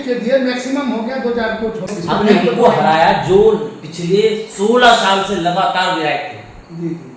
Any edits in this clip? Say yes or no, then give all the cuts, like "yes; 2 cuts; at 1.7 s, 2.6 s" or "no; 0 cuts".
yes; 1 cut; at 1.9 s